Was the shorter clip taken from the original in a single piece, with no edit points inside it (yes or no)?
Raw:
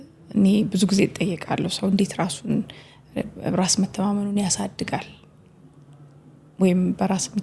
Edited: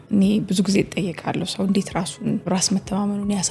no